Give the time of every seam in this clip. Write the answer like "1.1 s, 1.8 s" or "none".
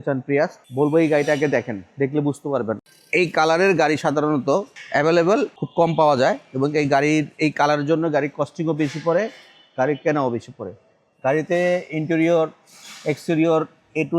2.8 s, 4.8 s, 5.6 s